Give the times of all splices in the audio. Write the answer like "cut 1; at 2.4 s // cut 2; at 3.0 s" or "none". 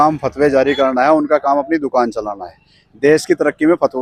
none